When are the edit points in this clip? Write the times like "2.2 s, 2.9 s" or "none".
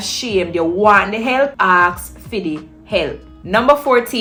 none